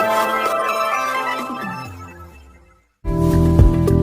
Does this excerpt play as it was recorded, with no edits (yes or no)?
no